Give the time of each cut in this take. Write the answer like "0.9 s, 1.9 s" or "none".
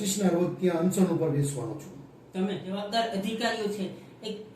2.7 s